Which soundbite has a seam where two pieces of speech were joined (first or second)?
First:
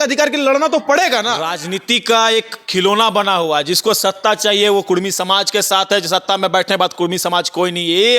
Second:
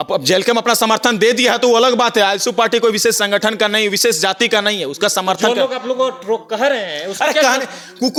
first